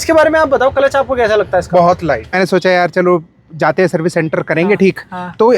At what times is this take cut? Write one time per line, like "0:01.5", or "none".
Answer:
0:02.4